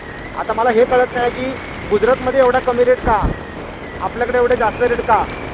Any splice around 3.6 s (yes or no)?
yes